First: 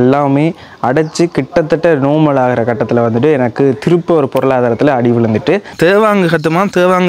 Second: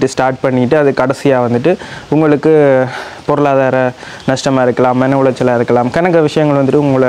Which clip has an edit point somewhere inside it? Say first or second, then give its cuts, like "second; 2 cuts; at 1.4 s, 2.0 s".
first; 1 cut; at 5.7 s